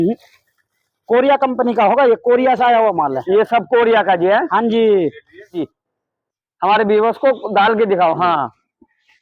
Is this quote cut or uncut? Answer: cut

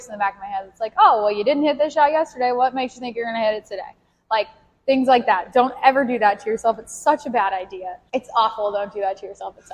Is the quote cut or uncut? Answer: uncut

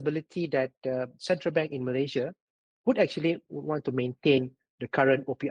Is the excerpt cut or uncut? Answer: uncut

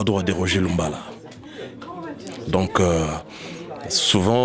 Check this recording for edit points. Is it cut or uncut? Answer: uncut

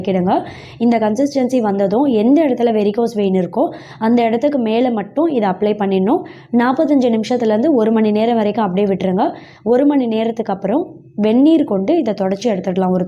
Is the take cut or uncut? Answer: uncut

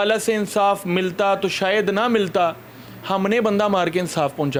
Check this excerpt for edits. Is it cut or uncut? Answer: uncut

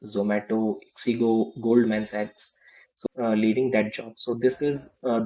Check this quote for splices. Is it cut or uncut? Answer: cut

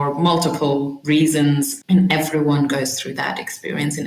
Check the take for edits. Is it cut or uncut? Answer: cut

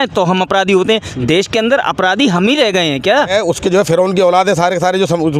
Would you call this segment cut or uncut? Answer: cut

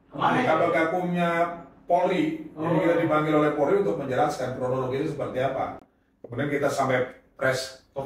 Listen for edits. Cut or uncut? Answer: uncut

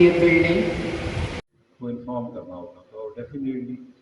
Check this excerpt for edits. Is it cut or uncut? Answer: cut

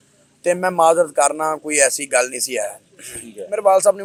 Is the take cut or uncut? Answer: uncut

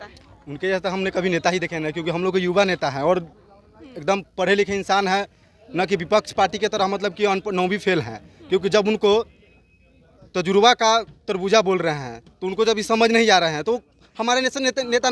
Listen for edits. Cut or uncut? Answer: uncut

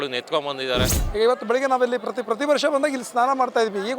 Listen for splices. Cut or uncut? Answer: cut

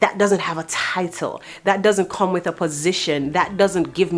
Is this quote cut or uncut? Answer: uncut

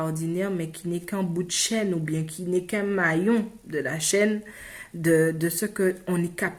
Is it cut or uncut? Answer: uncut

